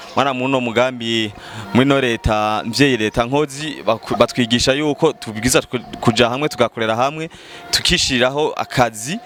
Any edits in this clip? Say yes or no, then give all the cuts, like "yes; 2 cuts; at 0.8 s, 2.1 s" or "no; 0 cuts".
no; 0 cuts